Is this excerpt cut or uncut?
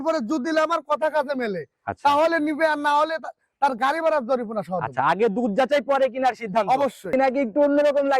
cut